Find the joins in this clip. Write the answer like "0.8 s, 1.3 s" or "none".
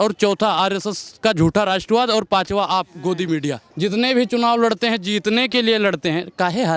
3.6 s